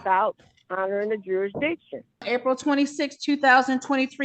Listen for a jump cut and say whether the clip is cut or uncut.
cut